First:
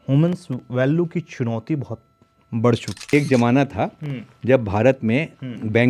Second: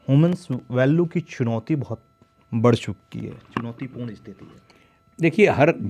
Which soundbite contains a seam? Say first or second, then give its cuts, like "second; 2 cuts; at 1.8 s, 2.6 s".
first; 1 cut; at 3.1 s